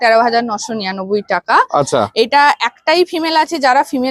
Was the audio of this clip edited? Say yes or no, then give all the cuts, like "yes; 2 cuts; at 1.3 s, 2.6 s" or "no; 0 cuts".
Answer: no; 0 cuts